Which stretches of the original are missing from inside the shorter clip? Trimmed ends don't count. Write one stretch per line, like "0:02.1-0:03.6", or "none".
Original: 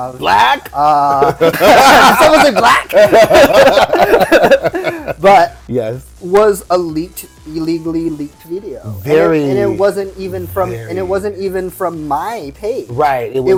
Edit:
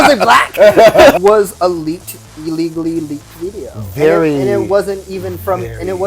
0:03.5-0:06.2